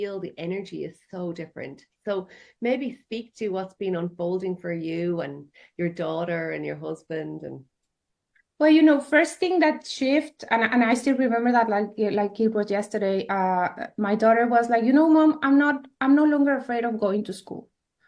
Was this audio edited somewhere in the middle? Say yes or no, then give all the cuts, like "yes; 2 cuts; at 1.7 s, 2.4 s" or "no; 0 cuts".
no; 0 cuts